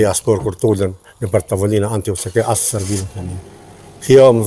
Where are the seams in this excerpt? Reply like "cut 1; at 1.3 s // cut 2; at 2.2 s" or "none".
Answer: none